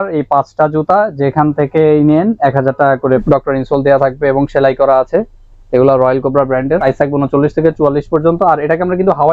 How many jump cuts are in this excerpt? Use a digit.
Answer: 2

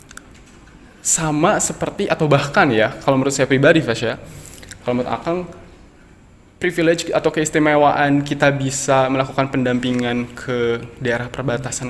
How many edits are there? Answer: 0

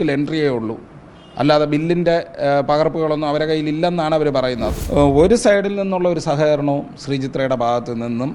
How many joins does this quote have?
1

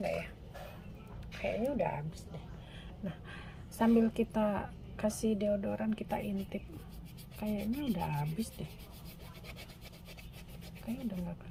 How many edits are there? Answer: 0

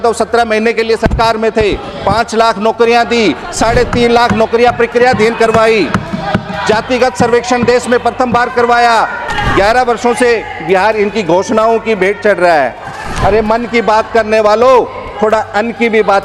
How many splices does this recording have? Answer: 1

